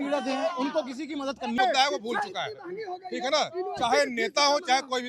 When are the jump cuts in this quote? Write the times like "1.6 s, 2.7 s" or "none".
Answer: 1.6 s